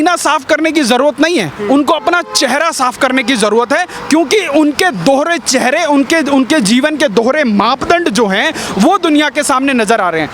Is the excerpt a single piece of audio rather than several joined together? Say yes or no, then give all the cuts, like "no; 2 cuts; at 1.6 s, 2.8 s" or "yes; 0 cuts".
yes; 0 cuts